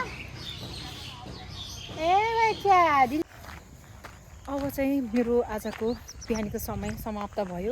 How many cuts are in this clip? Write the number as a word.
one